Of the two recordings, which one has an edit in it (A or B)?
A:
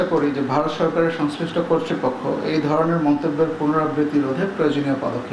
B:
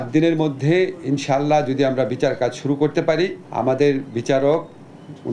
B